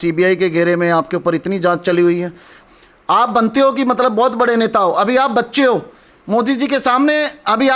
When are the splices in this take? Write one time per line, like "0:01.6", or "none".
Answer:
0:02.6